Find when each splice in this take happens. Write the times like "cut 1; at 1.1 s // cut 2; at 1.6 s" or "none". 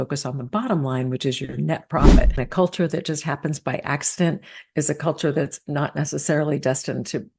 cut 1; at 2.3 s